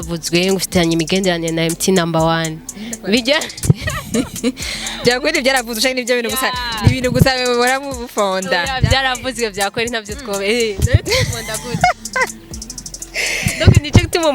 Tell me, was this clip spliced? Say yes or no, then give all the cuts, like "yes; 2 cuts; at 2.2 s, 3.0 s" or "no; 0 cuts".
no; 0 cuts